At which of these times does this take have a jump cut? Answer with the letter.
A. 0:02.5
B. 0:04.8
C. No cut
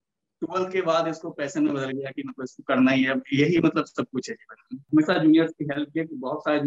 B